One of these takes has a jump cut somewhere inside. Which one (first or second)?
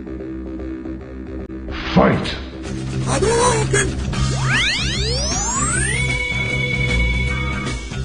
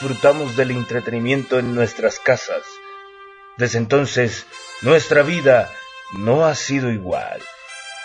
first